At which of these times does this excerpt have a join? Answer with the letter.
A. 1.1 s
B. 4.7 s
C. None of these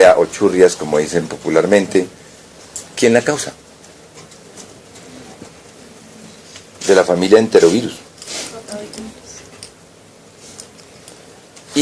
A